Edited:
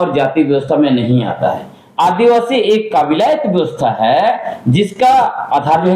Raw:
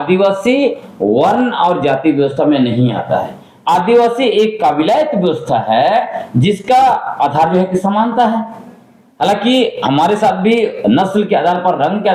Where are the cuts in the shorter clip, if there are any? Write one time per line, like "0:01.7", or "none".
none